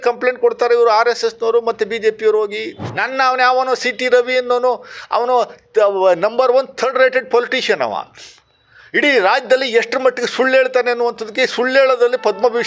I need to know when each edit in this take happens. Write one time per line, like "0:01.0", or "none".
0:02.8

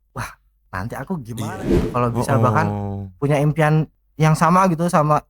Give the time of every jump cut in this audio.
0:01.5

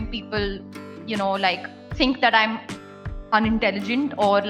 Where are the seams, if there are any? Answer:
0:01.8

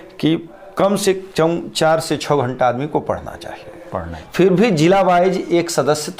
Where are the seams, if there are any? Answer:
0:04.2

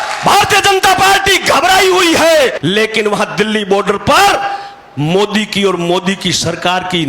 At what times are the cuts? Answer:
0:02.6

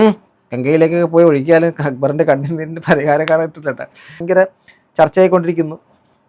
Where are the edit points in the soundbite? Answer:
0:04.2

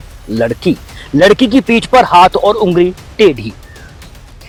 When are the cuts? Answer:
none

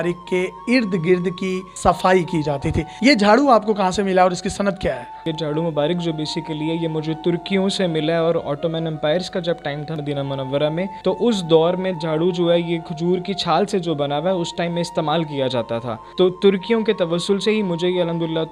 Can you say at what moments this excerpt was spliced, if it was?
none

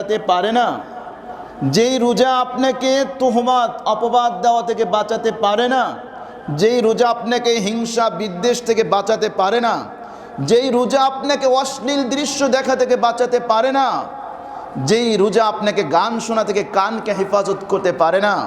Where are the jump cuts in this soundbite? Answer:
none

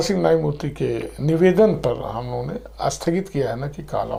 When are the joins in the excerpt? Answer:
none

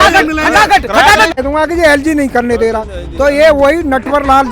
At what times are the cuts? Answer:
0:01.3

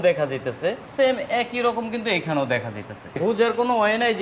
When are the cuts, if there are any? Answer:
0:00.8
0:03.2

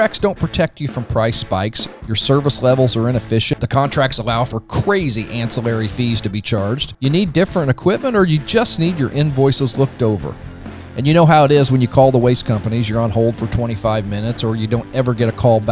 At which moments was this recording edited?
0:03.5
0:06.9

